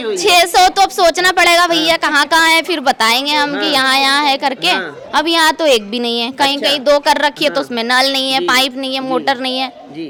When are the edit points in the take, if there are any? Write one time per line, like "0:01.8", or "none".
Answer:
none